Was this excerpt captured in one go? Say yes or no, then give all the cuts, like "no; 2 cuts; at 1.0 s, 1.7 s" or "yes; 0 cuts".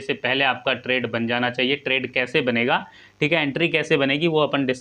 yes; 0 cuts